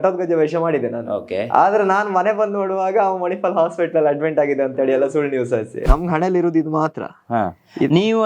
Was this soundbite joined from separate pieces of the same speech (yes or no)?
yes